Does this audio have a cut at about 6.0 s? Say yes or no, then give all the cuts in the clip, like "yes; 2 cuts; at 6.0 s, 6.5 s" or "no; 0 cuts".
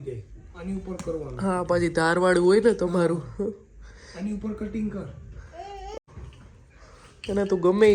yes; 1 cut; at 6.0 s